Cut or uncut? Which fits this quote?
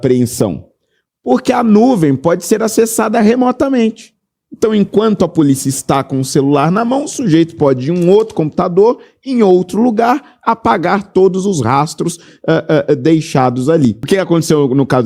cut